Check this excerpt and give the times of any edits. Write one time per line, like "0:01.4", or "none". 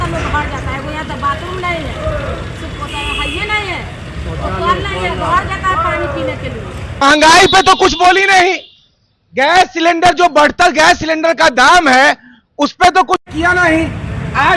0:07.0